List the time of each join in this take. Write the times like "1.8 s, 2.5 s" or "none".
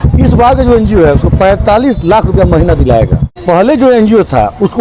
3.3 s